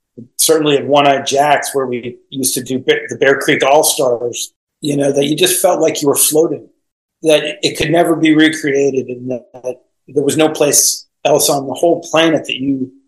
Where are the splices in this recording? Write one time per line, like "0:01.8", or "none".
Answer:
0:06.9